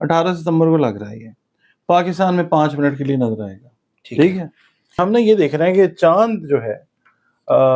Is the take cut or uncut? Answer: cut